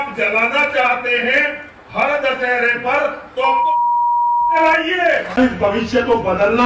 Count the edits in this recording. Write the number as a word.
zero